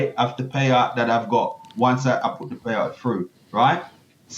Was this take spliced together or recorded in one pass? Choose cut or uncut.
uncut